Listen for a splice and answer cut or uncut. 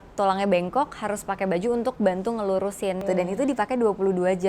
cut